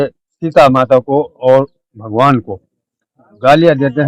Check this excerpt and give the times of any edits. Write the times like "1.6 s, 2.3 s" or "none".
none